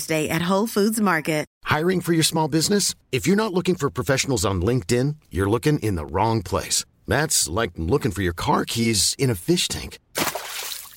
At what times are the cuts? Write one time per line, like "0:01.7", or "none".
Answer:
0:01.5